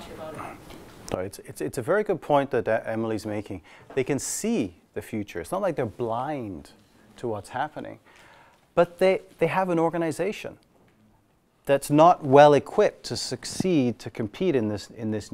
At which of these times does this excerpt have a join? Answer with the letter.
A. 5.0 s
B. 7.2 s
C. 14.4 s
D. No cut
B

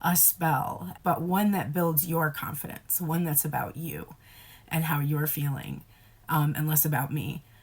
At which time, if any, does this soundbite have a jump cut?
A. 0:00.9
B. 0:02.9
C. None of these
A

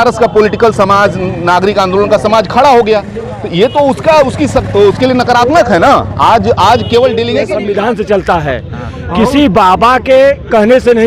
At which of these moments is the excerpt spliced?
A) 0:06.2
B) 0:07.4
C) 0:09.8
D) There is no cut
B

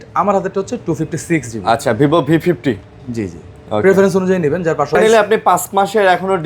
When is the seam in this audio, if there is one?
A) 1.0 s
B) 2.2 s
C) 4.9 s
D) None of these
C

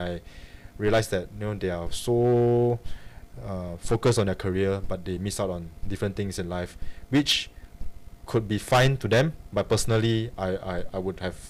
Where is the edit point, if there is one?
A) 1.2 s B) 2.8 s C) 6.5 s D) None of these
D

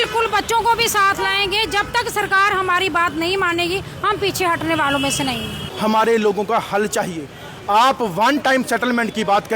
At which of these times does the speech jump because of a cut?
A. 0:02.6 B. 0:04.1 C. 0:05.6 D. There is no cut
C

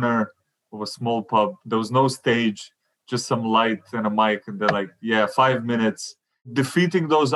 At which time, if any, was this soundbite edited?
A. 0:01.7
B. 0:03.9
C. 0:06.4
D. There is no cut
C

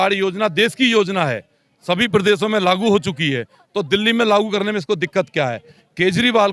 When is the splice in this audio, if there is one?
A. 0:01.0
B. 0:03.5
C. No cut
C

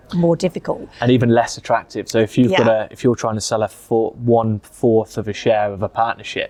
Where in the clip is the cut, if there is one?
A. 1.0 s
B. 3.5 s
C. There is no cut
C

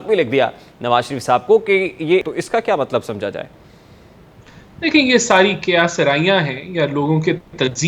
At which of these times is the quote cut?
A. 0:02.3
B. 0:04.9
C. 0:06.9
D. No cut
A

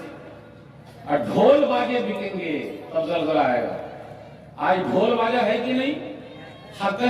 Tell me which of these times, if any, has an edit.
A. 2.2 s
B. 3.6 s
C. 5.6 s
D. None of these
D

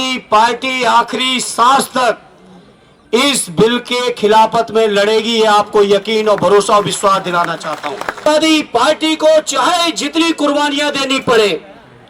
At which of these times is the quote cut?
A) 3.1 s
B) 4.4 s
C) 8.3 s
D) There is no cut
C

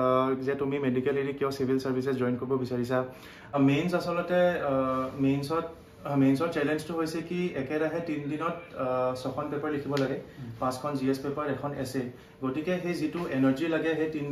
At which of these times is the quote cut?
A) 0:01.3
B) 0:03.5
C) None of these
B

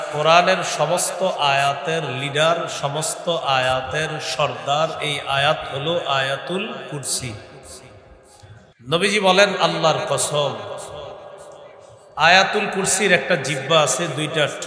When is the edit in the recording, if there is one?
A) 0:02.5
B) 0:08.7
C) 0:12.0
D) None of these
B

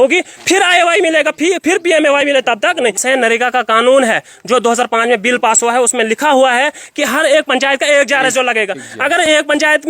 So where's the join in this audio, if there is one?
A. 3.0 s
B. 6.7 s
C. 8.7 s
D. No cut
A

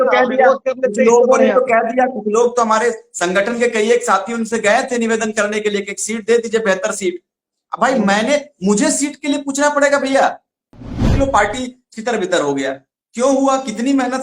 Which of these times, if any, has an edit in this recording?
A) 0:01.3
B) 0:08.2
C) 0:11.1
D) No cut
C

